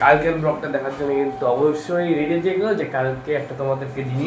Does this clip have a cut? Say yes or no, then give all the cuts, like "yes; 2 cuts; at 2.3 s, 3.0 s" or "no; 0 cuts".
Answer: no; 0 cuts